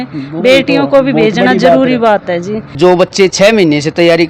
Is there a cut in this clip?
yes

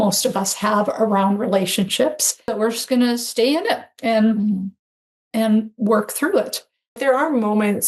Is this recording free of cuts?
no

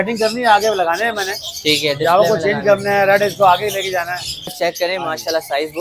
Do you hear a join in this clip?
yes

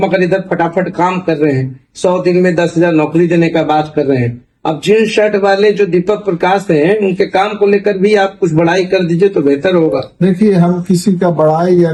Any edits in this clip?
no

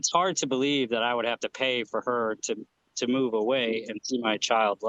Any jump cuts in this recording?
no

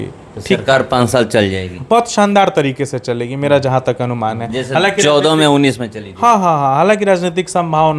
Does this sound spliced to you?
no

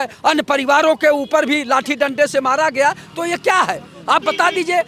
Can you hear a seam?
no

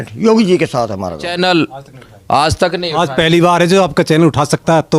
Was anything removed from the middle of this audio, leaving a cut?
yes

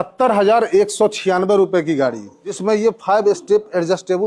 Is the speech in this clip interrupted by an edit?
yes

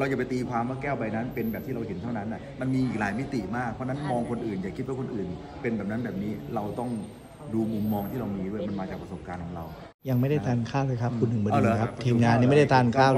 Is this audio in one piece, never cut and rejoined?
no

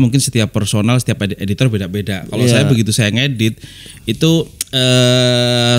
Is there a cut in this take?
no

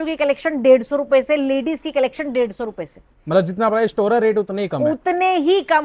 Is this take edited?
no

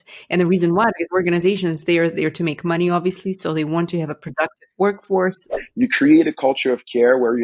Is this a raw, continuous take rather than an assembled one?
no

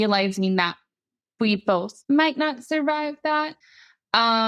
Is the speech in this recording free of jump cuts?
no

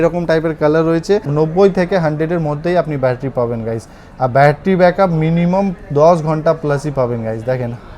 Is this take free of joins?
no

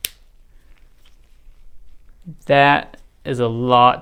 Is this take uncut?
yes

